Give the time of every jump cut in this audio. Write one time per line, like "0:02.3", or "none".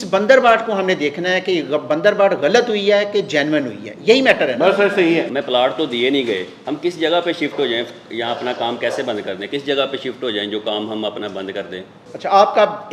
none